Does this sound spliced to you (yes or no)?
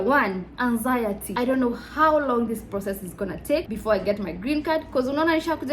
yes